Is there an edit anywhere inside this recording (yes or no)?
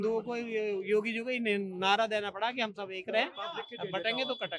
no